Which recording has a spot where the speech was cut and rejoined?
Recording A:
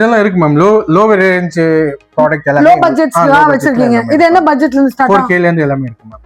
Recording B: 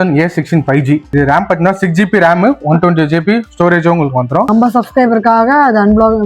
B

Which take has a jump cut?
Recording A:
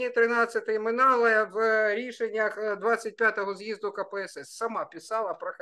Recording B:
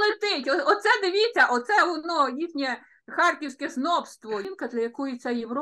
B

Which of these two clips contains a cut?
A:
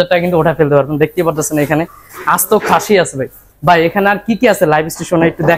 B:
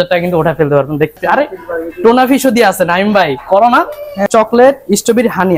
B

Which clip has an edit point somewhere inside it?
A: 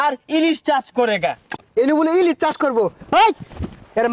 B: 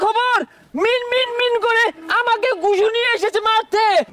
A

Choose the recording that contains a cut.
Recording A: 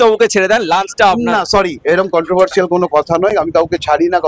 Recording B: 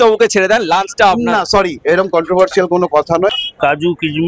B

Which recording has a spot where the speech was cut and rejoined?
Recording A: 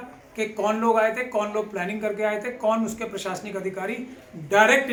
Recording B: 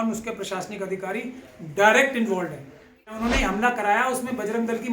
B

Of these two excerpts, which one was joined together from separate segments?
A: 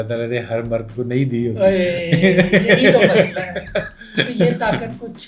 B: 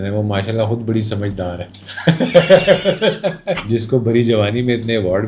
B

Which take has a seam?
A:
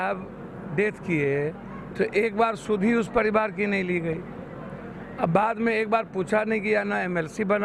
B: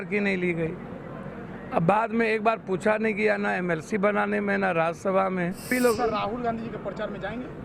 B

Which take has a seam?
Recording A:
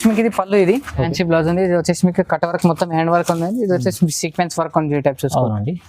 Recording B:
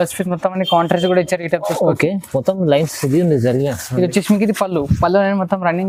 A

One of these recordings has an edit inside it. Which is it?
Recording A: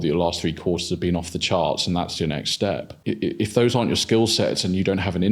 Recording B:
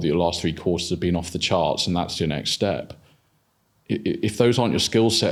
A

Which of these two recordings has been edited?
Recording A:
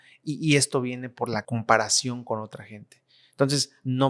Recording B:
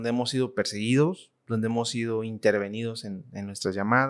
A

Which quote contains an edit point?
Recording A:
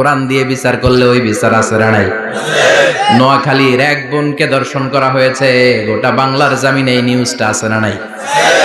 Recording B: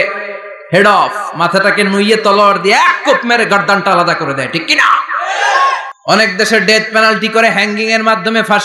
B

